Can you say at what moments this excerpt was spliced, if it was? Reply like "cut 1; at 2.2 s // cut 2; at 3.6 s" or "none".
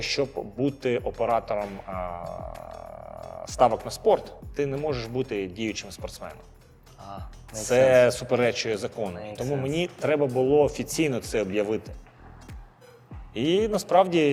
none

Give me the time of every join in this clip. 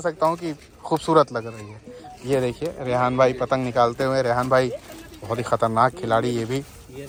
none

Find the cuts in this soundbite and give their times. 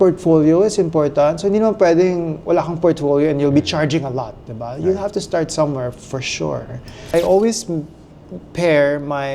cut 1; at 7.1 s

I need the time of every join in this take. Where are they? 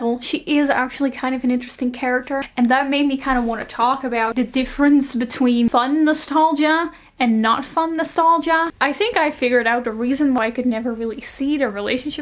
cut 1; at 2.5 s // cut 2; at 4.3 s // cut 3; at 5.7 s // cut 4; at 8.7 s // cut 5; at 10.4 s

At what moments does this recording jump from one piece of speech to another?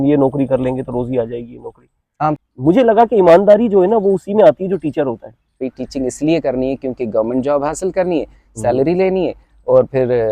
cut 1; at 2.4 s // cut 2; at 5.5 s

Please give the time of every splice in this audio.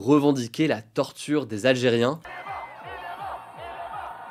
cut 1; at 2.2 s

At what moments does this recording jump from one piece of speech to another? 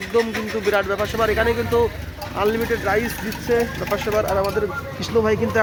none

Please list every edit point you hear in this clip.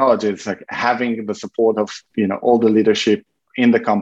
cut 1; at 2.0 s

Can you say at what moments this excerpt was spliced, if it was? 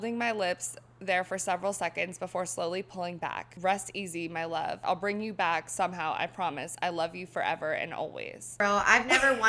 cut 1; at 3.5 s // cut 2; at 4.8 s // cut 3; at 8.6 s

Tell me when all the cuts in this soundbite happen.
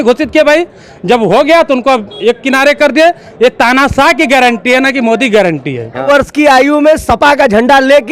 cut 1; at 6.1 s

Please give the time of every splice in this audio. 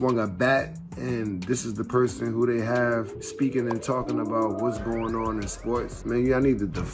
cut 1; at 3.2 s // cut 2; at 5.9 s

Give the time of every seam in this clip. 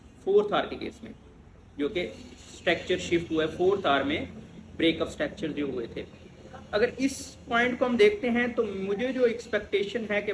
none

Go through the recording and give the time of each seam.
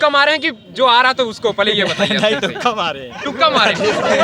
none

